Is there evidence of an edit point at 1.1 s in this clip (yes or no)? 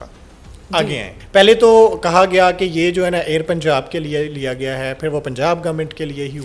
yes